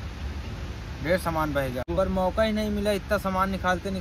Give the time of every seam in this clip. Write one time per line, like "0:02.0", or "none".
0:01.9